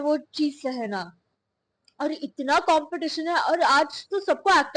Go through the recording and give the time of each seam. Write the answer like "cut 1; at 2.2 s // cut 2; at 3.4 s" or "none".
none